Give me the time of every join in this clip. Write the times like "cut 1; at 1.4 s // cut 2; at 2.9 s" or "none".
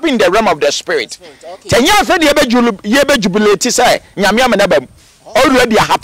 none